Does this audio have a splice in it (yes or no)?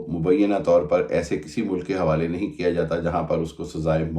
no